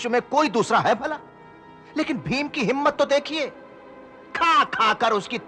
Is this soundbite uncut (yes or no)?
yes